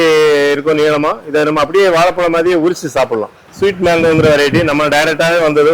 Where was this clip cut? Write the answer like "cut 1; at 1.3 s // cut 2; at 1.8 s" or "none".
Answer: cut 1; at 3.4 s